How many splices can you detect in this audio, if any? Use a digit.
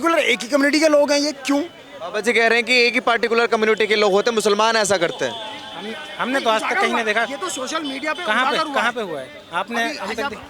0